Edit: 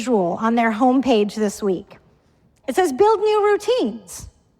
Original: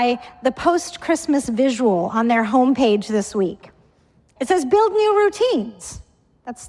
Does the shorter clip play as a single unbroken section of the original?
yes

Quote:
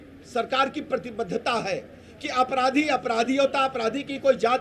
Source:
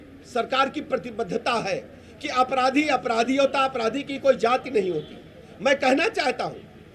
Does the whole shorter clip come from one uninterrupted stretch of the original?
yes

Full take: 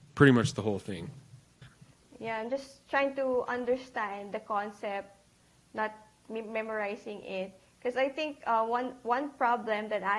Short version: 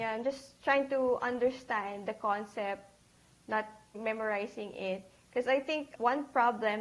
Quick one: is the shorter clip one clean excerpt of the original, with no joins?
no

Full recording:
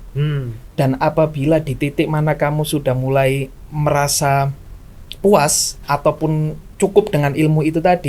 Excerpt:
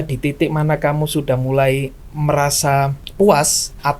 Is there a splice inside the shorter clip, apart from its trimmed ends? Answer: yes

